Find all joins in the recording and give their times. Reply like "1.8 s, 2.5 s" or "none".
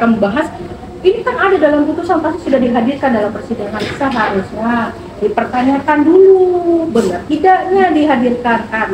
none